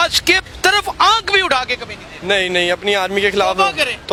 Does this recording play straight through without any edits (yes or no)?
yes